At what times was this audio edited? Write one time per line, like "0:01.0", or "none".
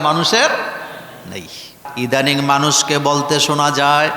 0:01.8